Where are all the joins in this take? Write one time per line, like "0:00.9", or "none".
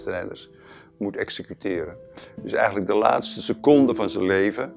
none